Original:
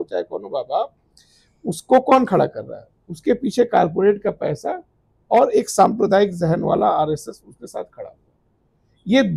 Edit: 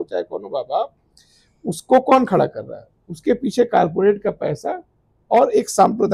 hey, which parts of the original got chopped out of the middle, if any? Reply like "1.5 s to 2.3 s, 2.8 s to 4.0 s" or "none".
none